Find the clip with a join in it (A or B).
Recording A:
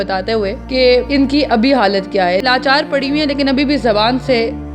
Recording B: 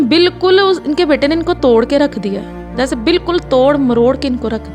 A